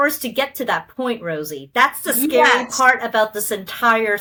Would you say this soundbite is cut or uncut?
uncut